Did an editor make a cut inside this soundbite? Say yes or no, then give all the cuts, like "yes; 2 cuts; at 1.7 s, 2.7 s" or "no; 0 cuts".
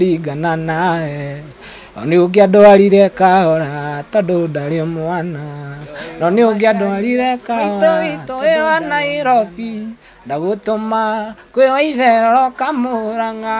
yes; 1 cut; at 7.8 s